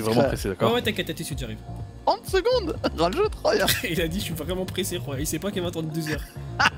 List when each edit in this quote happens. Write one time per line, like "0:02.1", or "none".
none